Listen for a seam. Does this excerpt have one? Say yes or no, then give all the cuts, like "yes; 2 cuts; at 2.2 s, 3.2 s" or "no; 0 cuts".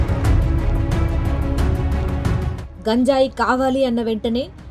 no; 0 cuts